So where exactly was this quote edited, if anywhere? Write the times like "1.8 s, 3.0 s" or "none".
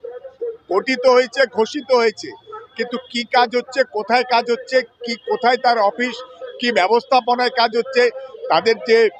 none